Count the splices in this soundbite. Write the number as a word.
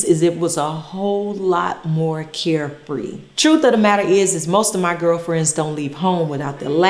one